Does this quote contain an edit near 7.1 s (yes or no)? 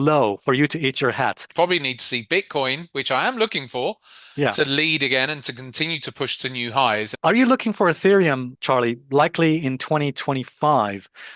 yes